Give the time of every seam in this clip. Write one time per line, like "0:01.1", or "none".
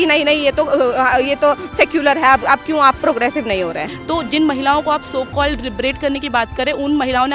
0:03.9